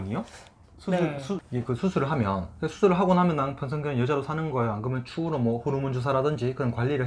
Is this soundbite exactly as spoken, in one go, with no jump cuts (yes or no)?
no